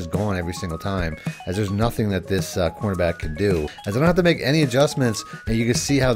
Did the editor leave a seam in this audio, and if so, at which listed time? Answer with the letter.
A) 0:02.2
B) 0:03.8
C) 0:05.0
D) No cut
B